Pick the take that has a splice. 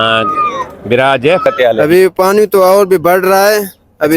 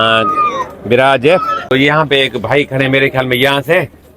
first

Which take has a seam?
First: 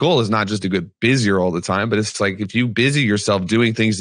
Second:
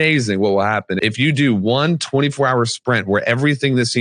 second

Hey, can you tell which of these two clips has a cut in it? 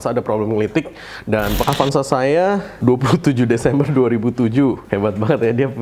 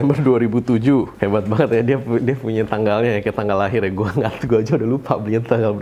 first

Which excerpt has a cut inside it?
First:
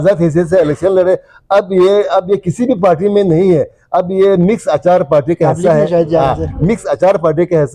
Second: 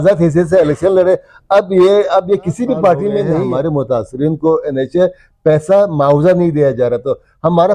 second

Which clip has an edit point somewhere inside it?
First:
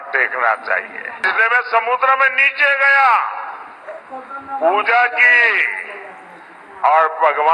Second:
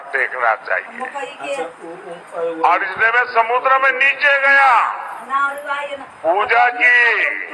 first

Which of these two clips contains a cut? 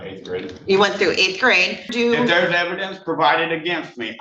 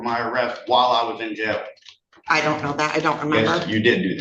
first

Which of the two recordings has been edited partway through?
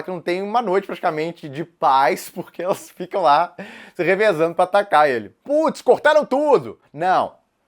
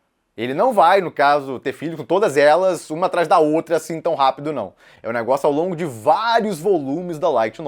first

